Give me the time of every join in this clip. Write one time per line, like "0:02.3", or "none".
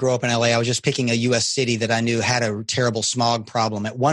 none

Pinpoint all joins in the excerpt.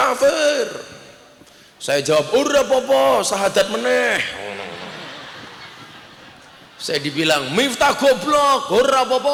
none

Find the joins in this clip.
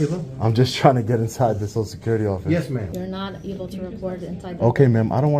0:02.0
0:02.9
0:04.0

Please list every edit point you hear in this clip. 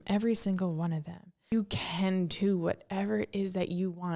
0:01.5

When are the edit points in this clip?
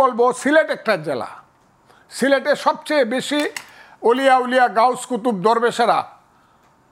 none

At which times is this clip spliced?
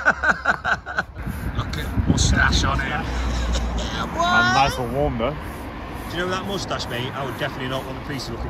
0:01.2

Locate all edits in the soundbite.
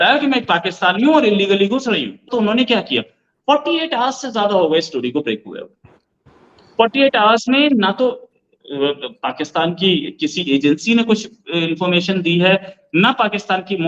0:02.2

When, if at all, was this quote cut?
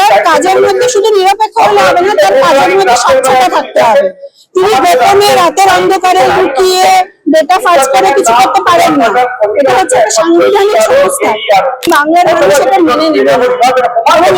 0:11.9

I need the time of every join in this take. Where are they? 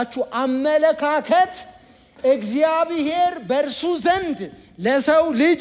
none

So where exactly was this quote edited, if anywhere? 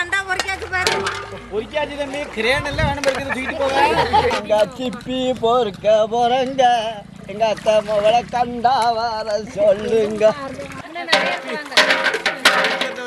0:04.3
0:10.8

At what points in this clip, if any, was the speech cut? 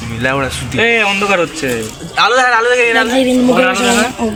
none

